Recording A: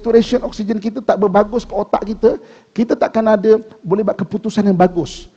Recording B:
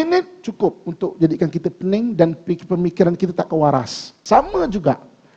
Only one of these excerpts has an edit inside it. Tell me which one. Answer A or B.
B